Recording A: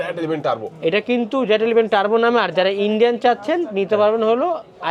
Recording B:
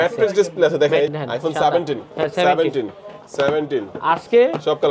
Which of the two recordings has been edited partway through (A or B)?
B